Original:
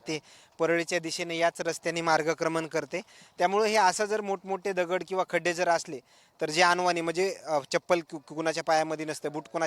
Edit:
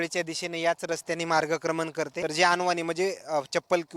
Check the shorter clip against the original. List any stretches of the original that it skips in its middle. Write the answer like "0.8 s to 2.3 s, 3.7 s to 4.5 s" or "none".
2.9 s to 6.3 s